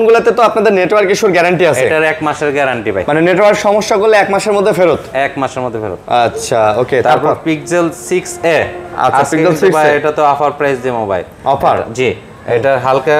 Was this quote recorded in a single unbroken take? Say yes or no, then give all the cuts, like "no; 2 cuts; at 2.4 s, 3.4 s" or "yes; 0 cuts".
yes; 0 cuts